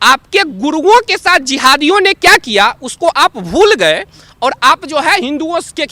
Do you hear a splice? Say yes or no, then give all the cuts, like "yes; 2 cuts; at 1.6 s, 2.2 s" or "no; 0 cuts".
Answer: no; 0 cuts